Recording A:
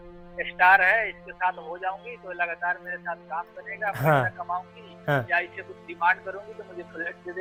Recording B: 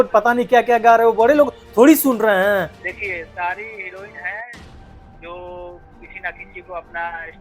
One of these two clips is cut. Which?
B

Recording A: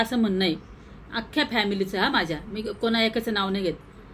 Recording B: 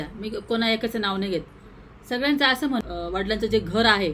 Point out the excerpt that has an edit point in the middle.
B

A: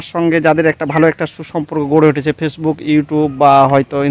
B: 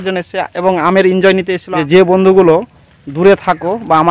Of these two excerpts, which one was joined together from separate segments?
B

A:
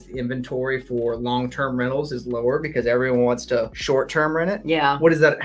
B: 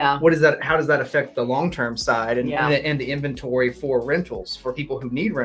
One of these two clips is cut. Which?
A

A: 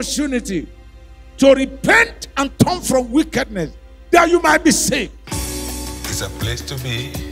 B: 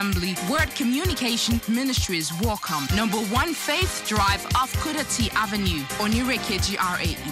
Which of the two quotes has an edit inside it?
A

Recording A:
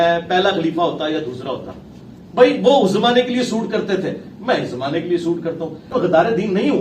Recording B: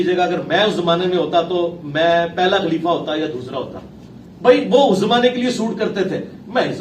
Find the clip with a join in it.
A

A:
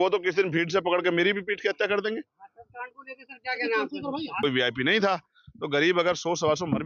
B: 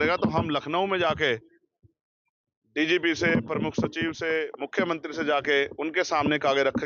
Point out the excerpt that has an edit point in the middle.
A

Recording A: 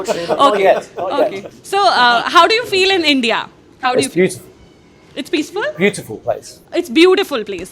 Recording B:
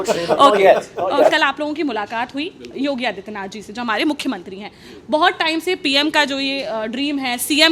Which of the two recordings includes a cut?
B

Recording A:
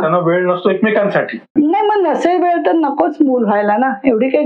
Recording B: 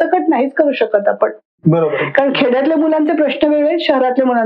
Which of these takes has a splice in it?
A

